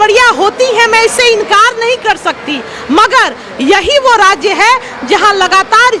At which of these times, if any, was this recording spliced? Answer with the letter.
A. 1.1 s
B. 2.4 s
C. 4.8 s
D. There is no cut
D